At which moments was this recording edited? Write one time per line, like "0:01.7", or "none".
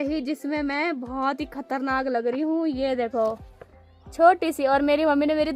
none